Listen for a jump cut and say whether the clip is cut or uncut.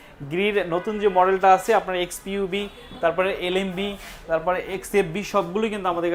uncut